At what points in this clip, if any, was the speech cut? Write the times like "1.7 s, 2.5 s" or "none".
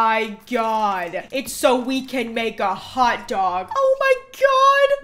3.7 s

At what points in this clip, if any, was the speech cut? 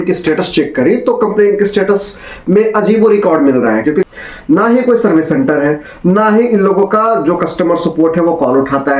4.1 s

